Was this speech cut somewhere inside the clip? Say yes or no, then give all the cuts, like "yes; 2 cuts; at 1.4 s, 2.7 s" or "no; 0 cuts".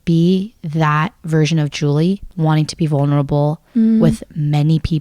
yes; 1 cut; at 2.3 s